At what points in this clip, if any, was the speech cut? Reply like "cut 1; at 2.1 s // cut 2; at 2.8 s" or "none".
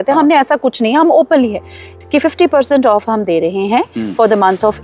cut 1; at 1.9 s

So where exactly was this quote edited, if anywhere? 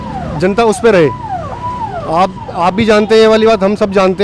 none

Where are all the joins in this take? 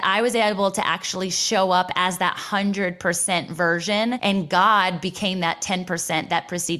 cut 1; at 4.2 s

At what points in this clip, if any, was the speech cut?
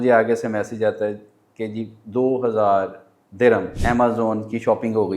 cut 1; at 3.7 s

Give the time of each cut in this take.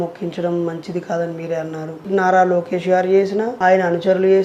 cut 1; at 2.1 s // cut 2; at 3.5 s

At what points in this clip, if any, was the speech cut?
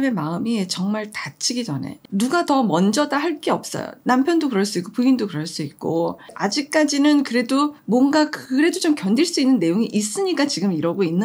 none

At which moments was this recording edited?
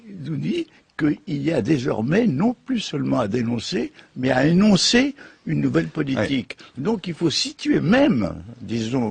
none

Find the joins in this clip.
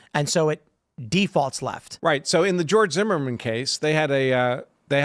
cut 1; at 1.9 s

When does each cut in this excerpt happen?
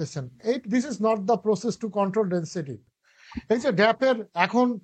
cut 1; at 2.8 s

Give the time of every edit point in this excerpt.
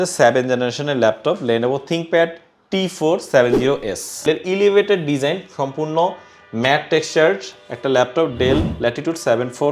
cut 1; at 4.2 s

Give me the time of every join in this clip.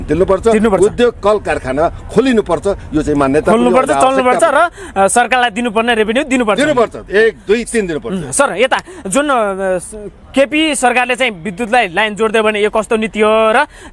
none

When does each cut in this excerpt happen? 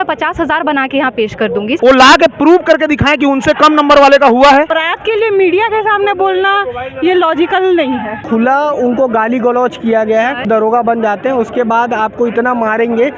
cut 1; at 1.8 s // cut 2; at 4.8 s // cut 3; at 8.2 s // cut 4; at 10.4 s

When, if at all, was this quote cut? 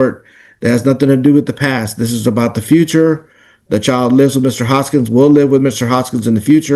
none

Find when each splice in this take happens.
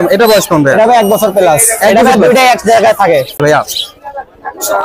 cut 1; at 3.4 s

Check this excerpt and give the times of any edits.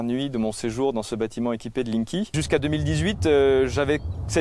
cut 1; at 2.4 s

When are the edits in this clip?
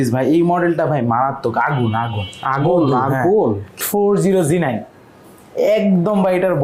cut 1; at 3.8 s

